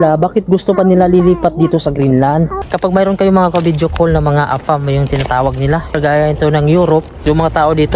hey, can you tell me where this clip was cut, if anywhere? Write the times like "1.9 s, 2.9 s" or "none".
2.6 s, 6.0 s, 7.1 s